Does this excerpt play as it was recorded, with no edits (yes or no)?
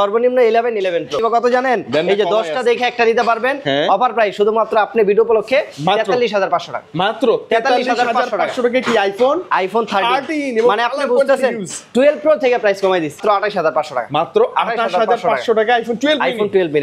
no